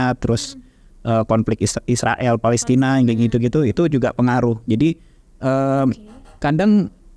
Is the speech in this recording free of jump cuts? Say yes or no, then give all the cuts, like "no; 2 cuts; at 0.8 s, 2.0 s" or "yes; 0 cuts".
yes; 0 cuts